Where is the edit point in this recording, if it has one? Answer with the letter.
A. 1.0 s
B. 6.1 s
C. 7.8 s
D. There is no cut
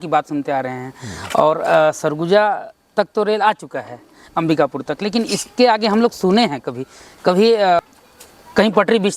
C